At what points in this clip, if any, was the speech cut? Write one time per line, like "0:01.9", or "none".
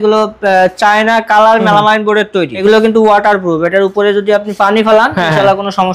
0:02.6